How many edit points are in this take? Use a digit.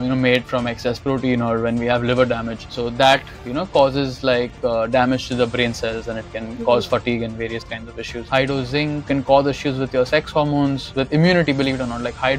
1